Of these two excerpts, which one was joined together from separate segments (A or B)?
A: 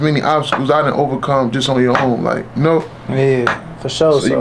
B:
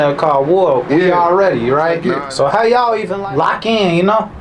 B